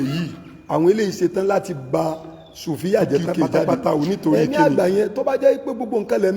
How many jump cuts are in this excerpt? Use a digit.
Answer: 1